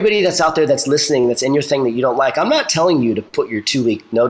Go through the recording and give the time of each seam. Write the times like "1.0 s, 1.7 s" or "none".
none